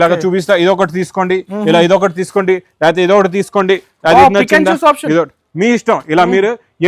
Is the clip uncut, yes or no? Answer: yes